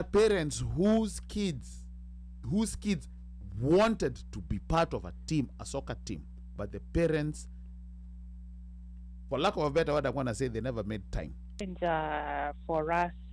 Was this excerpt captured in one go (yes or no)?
no